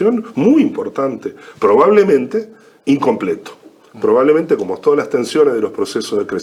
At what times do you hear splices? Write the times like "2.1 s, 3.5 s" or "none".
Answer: none